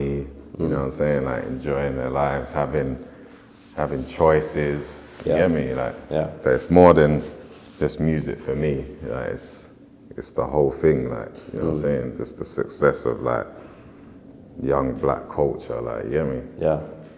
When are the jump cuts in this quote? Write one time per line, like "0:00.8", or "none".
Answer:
none